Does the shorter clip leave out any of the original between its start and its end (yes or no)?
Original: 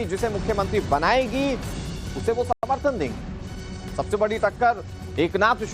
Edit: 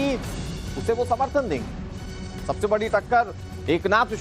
yes